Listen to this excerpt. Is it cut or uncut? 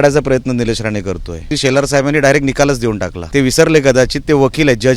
cut